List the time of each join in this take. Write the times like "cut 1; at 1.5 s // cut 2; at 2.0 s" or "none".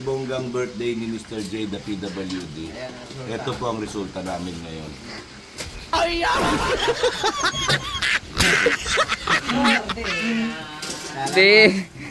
none

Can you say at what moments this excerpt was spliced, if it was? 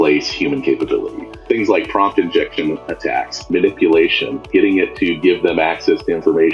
cut 1; at 1.4 s // cut 2; at 3.4 s // cut 3; at 4.4 s

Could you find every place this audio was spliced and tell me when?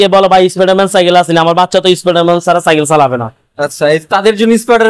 none

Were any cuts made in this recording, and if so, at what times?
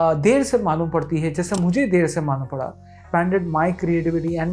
cut 1; at 3.0 s

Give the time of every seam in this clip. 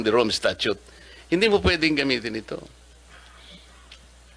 none

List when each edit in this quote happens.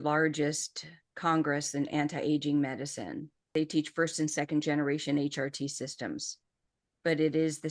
cut 1; at 3.3 s

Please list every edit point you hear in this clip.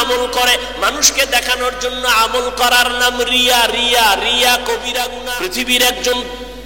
cut 1; at 5.5 s

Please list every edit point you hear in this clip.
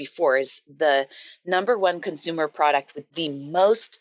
none

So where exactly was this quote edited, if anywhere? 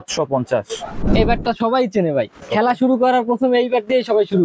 cut 1; at 1.0 s // cut 2; at 2.4 s

